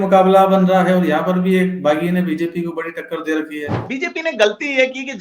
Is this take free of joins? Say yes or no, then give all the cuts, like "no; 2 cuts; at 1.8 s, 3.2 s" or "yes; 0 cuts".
no; 1 cut; at 3.8 s